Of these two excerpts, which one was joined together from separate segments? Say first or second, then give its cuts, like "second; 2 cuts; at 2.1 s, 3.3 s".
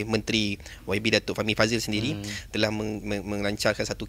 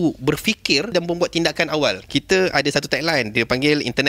second; 2 cuts; at 0.9 s, 2.0 s